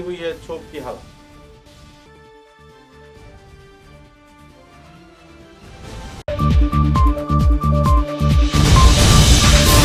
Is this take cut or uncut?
uncut